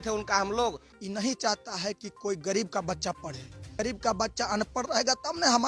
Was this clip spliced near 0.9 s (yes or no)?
yes